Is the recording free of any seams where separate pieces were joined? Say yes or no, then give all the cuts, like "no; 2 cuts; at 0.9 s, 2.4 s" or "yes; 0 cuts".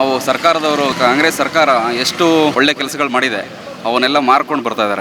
no; 2 cuts; at 0.9 s, 2.5 s